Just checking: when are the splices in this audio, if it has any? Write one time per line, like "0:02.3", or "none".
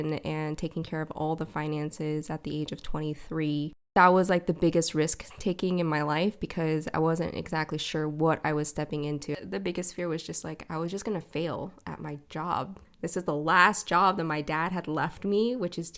0:03.9
0:09.4
0:12.8